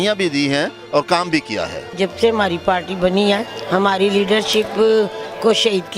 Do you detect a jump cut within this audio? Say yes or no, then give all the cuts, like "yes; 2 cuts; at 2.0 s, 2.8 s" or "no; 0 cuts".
yes; 2 cuts; at 1.9 s, 3.5 s